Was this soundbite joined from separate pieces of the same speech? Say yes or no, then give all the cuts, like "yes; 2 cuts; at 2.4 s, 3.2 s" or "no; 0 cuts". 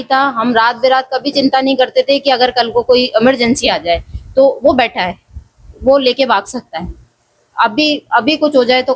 no; 0 cuts